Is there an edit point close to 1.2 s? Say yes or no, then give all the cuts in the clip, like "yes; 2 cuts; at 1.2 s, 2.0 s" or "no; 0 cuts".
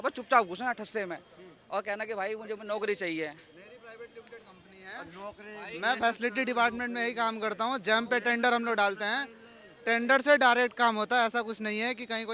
no; 0 cuts